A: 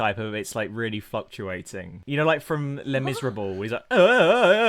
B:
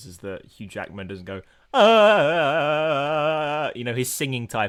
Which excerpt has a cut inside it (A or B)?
A